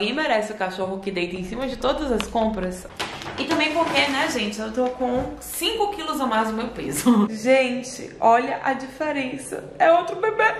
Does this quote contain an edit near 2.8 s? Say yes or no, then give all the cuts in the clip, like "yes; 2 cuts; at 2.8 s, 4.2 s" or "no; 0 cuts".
yes; 2 cuts; at 2.8 s, 7.3 s